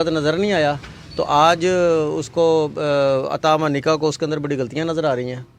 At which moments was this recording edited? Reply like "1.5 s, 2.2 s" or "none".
none